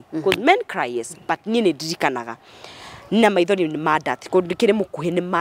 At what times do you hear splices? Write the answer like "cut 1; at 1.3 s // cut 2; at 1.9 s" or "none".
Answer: none